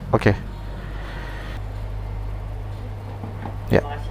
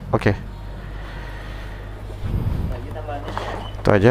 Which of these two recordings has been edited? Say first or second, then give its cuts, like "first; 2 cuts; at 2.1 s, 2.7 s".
first; 1 cut; at 1.6 s